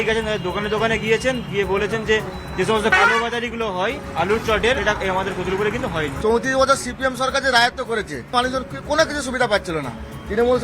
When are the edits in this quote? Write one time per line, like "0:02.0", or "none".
0:04.8
0:06.1
0:08.3